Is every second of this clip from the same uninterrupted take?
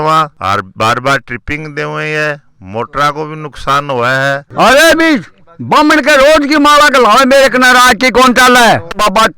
no; 1 cut; at 4.5 s

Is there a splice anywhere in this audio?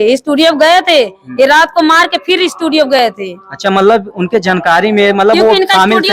no; 0 cuts

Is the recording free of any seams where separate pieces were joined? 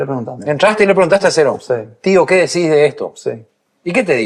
yes; 0 cuts

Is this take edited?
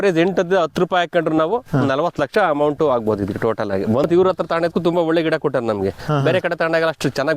yes; 1 cut; at 4.1 s

